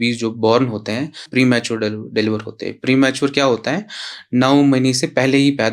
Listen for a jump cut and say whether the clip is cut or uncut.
cut